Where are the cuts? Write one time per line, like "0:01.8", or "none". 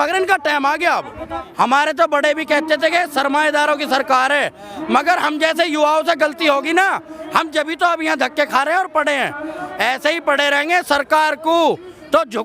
0:01.4